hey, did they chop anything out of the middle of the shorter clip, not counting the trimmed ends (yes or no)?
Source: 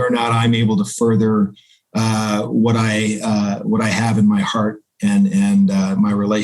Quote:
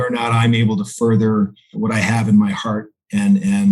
yes